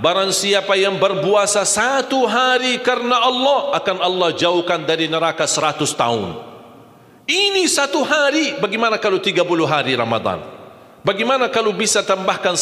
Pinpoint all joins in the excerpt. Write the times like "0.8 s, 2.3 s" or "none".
none